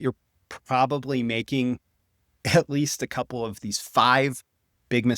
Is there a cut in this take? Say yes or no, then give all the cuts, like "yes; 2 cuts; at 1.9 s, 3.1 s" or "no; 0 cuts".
yes; 1 cut; at 3.6 s